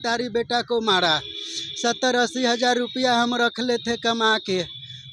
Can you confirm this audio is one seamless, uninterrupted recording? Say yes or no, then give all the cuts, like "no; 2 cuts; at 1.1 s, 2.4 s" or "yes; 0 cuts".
yes; 0 cuts